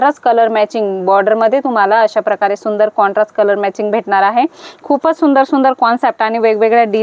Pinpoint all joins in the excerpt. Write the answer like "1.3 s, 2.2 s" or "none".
none